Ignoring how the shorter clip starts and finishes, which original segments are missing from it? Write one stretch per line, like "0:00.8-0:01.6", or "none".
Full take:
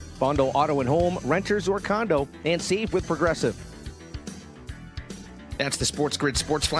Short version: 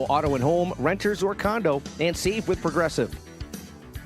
0:03.5-0:03.8